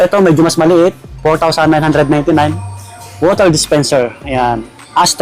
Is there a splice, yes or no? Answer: no